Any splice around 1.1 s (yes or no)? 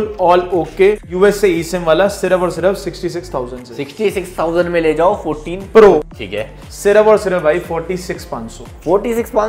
yes